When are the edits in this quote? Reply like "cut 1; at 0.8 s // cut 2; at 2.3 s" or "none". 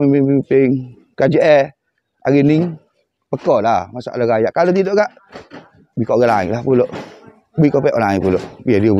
none

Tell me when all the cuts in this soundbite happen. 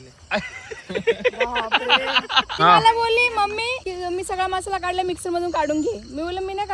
cut 1; at 2.5 s // cut 2; at 3.8 s

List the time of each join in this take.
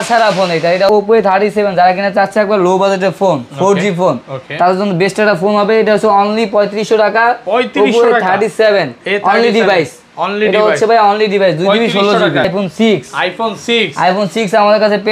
cut 1; at 0.9 s // cut 2; at 12.5 s

